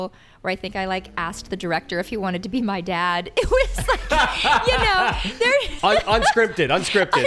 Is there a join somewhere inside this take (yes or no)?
no